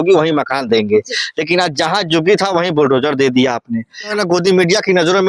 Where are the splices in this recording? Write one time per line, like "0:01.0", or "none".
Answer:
0:04.1